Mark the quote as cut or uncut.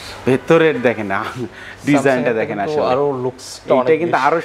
uncut